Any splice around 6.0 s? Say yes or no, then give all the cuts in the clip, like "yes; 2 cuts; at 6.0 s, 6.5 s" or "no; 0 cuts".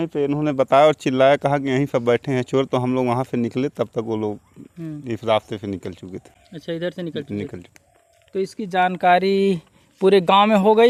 no; 0 cuts